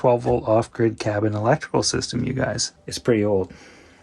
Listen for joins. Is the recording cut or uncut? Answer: cut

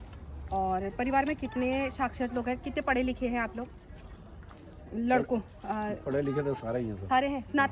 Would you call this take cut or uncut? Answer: uncut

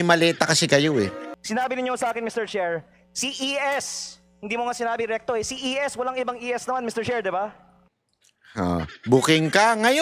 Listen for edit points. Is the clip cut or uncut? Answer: cut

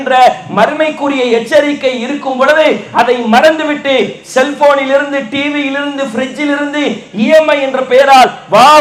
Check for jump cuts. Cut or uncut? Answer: uncut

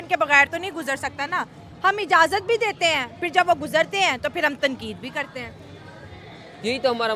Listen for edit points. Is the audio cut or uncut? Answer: uncut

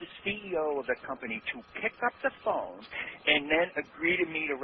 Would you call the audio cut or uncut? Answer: cut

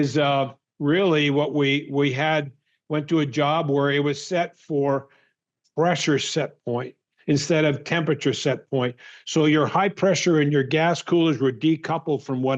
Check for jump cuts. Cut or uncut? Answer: uncut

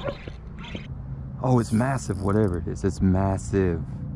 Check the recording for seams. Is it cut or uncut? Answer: cut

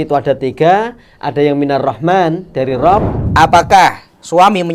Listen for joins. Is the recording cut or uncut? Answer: cut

